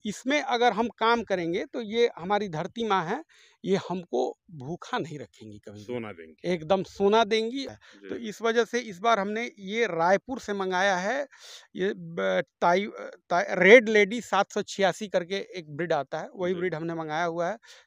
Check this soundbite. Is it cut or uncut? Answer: cut